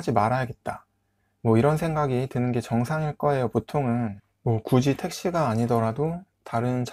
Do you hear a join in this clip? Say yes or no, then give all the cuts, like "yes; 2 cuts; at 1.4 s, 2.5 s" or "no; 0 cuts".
yes; 1 cut; at 4.3 s